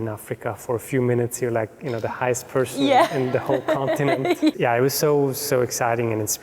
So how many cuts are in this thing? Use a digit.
1